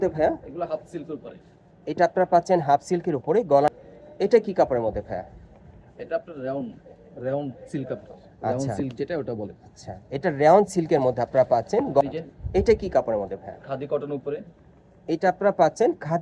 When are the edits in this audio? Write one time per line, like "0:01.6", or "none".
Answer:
0:03.7
0:12.0